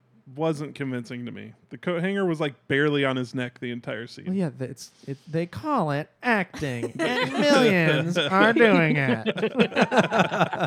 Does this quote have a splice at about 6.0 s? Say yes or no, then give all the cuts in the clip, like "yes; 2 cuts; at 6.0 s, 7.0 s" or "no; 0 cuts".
no; 0 cuts